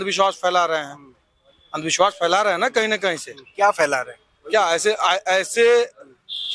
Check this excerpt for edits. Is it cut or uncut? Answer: uncut